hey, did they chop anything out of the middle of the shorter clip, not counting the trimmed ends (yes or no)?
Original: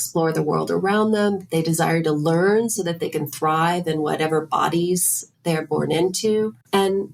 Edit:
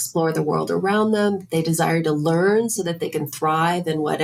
no